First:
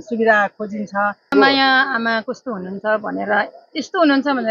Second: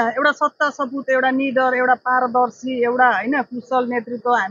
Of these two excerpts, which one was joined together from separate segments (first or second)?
first